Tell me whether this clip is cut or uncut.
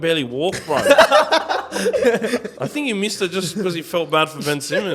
cut